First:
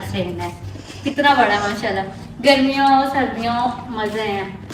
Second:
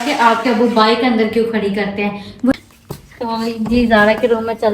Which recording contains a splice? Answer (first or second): second